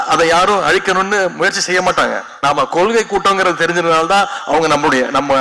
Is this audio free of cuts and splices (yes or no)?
no